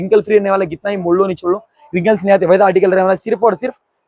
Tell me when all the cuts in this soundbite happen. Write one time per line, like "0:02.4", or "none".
none